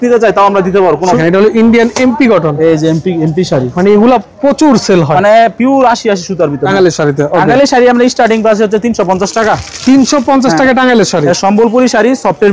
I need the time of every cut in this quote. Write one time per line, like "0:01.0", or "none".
0:01.2
0:06.6